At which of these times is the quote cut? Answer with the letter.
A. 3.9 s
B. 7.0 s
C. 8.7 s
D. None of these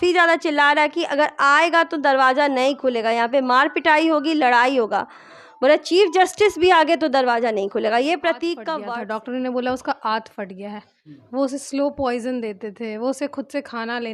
C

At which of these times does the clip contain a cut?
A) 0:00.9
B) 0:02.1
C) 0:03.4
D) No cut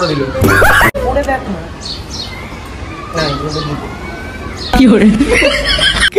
A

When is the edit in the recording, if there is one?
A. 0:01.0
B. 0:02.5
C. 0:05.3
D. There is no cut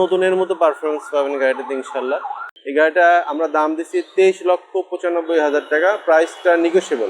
B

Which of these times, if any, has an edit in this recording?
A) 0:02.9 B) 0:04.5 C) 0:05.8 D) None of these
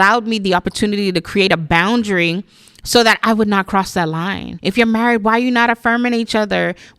B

